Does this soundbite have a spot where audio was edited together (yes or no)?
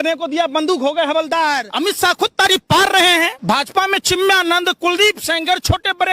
yes